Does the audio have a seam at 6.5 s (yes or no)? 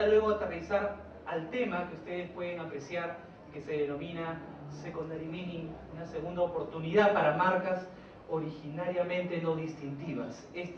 yes